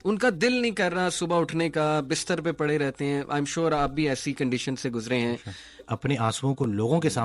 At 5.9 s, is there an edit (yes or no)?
yes